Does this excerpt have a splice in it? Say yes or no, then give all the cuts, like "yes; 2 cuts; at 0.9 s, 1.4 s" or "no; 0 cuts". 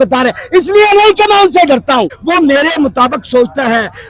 yes; 1 cut; at 2.2 s